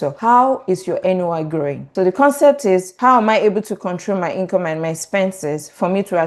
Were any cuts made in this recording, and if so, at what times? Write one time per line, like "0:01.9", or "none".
0:01.8

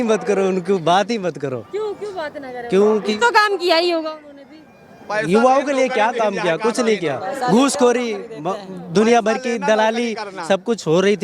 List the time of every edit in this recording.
none

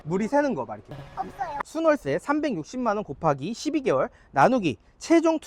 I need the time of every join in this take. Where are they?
0:01.6

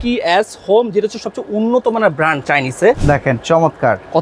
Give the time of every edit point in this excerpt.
0:03.0

